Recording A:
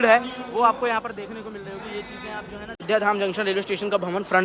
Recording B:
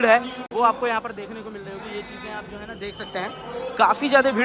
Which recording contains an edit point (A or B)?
A